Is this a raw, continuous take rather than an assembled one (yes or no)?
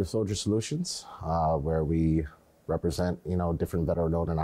yes